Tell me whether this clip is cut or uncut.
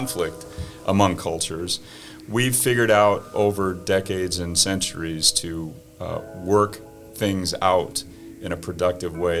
uncut